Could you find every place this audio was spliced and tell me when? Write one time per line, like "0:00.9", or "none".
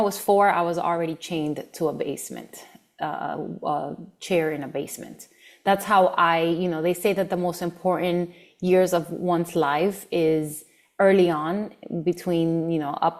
none